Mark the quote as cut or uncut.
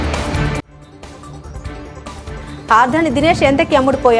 cut